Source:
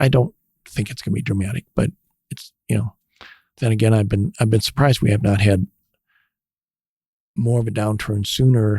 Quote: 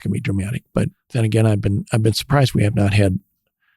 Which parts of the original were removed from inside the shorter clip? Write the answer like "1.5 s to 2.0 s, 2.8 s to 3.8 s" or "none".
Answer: 2.0 s to 3.5 s